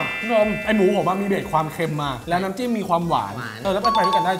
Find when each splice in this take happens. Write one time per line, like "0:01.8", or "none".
0:03.5